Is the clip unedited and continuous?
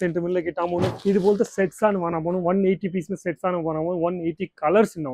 no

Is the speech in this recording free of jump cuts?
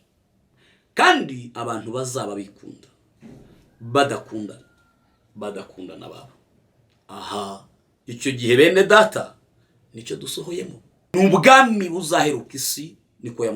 no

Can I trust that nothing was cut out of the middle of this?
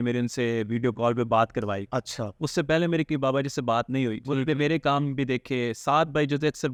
yes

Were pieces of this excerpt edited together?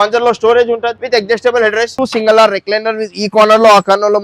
yes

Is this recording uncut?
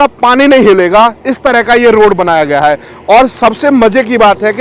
yes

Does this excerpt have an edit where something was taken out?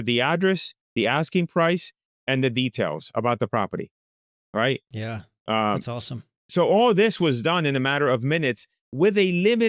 no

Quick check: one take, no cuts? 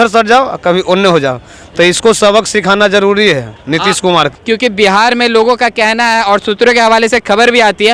yes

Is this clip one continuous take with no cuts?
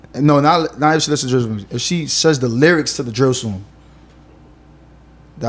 yes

